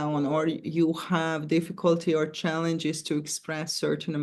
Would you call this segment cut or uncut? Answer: uncut